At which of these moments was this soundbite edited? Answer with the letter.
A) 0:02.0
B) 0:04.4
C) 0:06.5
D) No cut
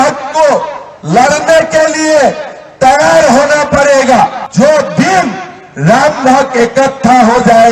B